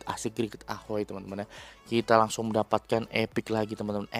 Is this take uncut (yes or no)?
yes